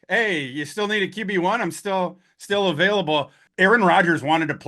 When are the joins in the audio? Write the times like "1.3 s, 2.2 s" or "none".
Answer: 3.4 s